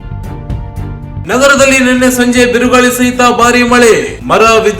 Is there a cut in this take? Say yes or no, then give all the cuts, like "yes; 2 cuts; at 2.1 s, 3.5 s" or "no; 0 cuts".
yes; 1 cut; at 1.2 s